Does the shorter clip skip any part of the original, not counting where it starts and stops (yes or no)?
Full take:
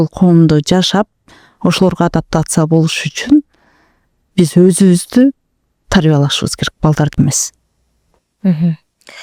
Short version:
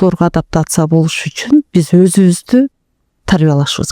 yes